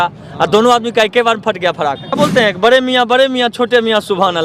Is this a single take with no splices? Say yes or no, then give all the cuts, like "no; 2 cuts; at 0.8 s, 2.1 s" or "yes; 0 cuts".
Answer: no; 1 cut; at 2.2 s